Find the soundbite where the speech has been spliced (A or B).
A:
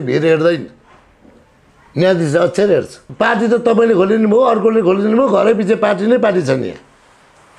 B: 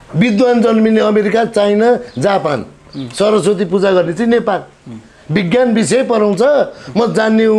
A